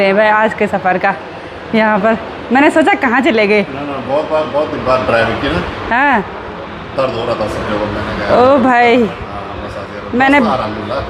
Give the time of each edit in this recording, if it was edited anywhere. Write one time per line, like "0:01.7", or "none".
none